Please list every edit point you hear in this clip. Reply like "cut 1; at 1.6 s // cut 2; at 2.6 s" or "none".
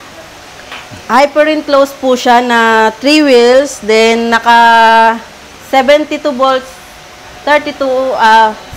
none